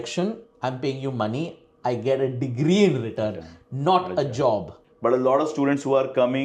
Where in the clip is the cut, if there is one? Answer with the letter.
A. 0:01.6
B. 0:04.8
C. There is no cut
B